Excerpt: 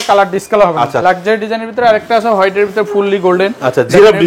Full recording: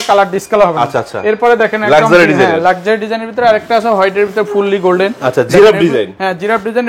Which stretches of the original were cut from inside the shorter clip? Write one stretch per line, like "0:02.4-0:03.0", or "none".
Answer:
0:01.0-0:02.6